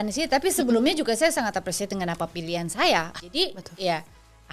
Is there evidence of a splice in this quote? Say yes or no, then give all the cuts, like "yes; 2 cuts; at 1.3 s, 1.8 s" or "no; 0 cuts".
yes; 1 cut; at 3.2 s